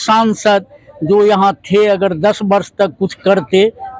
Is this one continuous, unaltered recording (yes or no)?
yes